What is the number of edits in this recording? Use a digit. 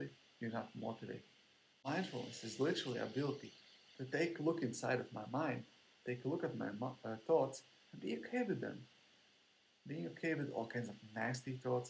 1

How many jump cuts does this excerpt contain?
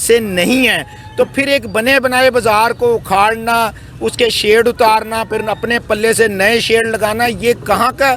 0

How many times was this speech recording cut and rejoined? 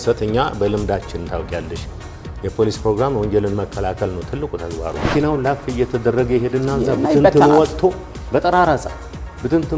1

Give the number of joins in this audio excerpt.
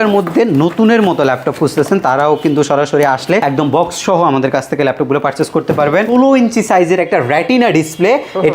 1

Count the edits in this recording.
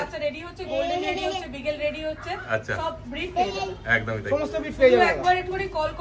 0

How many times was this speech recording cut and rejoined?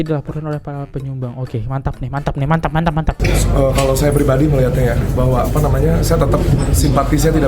1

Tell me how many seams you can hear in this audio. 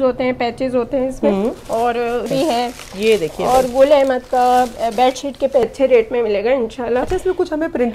2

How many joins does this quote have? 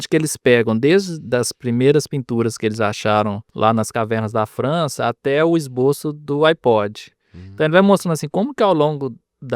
1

